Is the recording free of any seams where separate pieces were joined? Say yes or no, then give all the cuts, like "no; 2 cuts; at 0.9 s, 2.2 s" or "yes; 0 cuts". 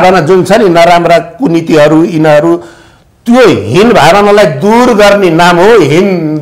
yes; 0 cuts